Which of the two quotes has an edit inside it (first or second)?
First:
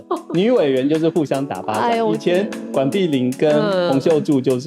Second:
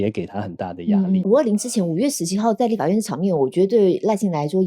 second